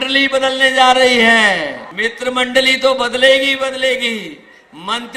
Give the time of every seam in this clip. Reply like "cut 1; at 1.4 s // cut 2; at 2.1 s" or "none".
cut 1; at 1.8 s